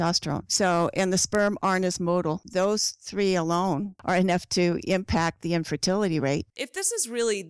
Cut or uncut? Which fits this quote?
cut